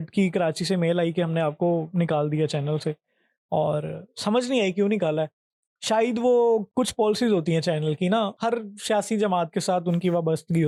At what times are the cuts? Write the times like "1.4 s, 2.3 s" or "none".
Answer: none